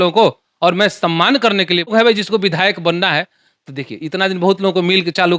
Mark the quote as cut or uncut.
cut